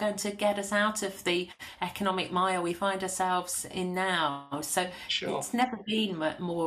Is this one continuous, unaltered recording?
yes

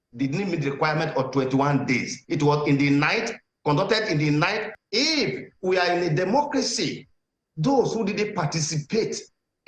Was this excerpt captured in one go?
no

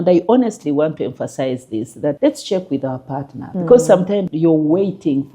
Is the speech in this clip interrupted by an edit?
yes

